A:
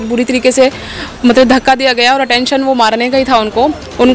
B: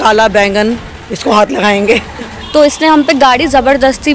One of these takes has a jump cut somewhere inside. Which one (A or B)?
B